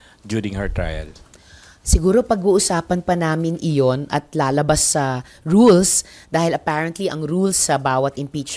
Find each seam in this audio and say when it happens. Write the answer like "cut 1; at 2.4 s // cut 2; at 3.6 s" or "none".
none